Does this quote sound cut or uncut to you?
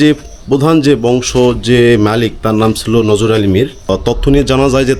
cut